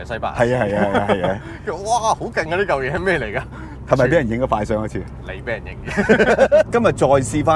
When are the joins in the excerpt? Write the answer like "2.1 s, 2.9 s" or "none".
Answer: 6.7 s